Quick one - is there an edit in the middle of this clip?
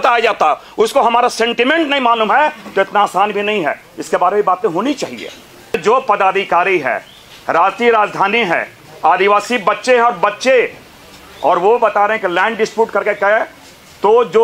yes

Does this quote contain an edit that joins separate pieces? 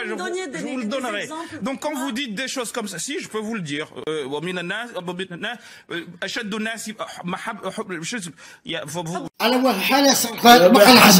no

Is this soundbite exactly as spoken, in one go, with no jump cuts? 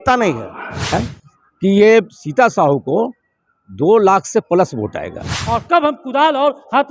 no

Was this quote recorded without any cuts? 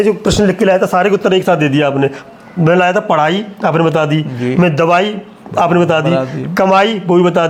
yes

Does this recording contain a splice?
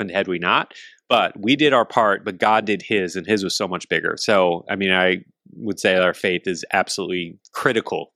no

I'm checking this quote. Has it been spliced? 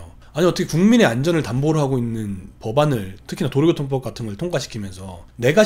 no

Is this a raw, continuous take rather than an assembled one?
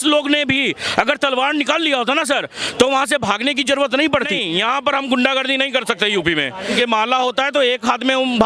no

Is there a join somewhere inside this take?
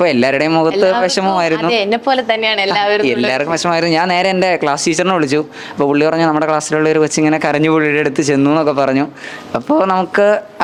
no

